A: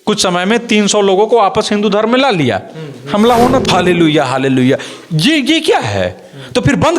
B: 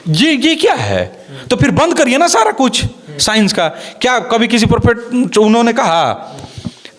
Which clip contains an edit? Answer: A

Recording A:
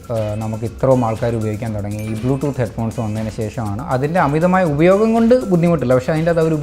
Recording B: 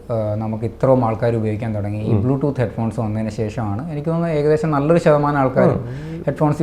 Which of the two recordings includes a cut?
A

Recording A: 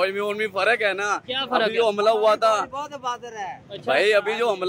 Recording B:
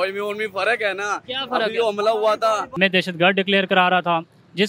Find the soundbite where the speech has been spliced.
B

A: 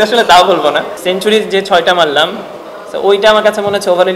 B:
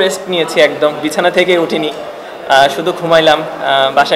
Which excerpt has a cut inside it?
A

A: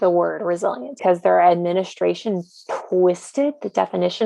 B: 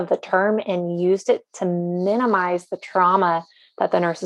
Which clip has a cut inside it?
A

